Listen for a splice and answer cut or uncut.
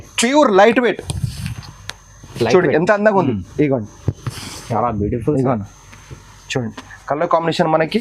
cut